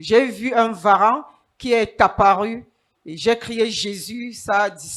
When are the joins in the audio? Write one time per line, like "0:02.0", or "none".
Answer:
none